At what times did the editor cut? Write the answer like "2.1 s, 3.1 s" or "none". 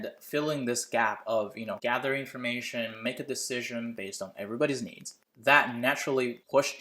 1.8 s